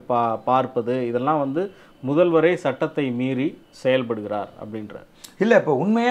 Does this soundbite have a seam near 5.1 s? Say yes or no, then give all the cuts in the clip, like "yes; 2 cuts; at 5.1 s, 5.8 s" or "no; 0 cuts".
no; 0 cuts